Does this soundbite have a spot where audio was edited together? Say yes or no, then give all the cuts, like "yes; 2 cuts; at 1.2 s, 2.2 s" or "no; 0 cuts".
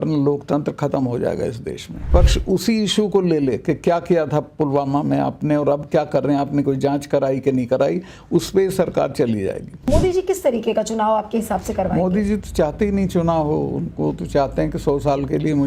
yes; 2 cuts; at 2.1 s, 9.7 s